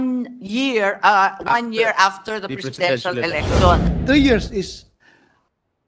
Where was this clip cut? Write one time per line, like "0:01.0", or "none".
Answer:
0:03.9